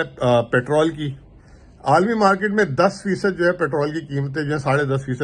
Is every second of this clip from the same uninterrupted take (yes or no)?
yes